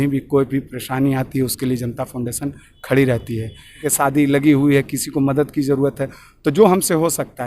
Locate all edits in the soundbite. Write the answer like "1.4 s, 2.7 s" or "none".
3.9 s